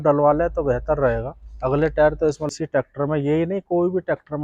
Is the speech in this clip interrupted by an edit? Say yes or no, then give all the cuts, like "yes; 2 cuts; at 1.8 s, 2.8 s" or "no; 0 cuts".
yes; 1 cut; at 2.5 s